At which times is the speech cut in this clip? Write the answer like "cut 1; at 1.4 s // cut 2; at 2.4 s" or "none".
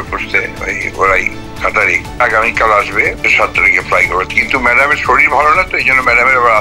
cut 1; at 2.2 s // cut 2; at 3.2 s